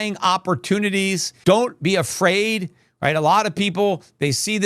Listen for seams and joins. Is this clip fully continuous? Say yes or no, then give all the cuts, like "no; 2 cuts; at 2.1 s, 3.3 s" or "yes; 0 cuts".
no; 1 cut; at 1.3 s